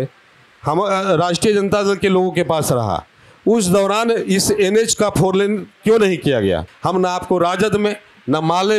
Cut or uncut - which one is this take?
cut